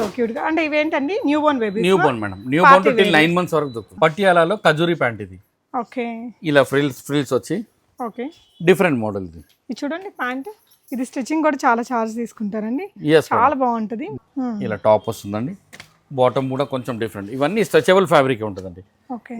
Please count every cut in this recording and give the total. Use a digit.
2